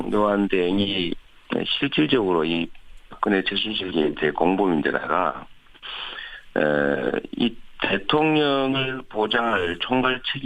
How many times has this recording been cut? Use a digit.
1